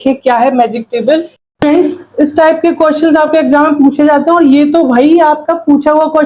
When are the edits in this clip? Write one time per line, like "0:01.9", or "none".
0:01.3